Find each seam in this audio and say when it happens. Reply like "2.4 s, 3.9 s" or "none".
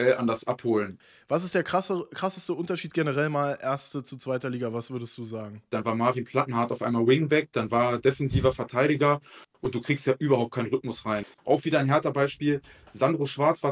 1.0 s, 5.6 s, 11.3 s

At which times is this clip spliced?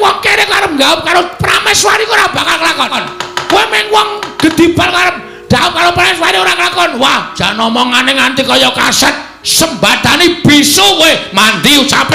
none

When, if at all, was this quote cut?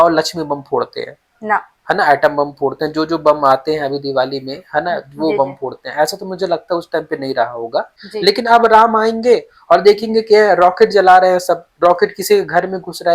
8.0 s

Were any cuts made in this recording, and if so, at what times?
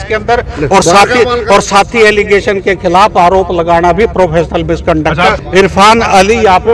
5.3 s

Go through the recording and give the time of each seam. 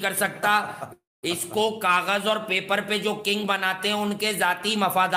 none

